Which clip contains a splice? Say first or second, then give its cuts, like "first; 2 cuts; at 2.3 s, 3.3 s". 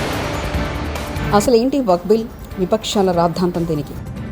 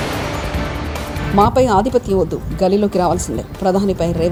first; 1 cut; at 1.2 s